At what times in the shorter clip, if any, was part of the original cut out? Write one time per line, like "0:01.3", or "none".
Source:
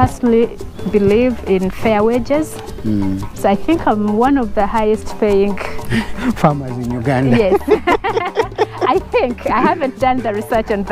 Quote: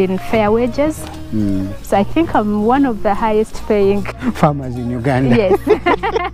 0:04.1